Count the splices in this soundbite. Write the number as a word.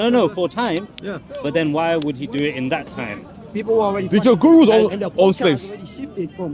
one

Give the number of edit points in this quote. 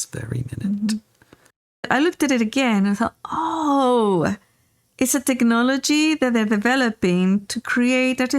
one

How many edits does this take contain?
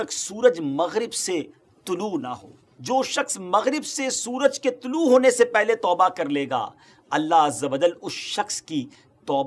one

